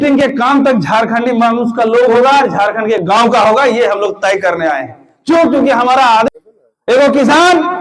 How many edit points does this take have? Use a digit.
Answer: 1